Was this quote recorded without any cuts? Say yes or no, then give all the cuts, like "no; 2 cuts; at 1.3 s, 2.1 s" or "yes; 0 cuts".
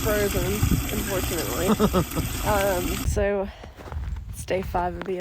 no; 1 cut; at 3.1 s